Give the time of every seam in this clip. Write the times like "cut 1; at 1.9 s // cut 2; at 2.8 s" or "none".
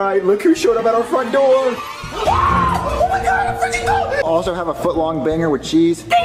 cut 1; at 4.2 s